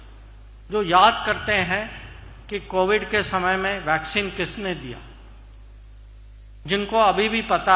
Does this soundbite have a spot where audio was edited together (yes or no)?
no